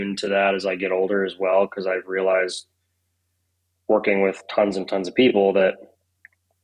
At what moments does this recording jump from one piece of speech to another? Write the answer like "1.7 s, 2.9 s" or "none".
none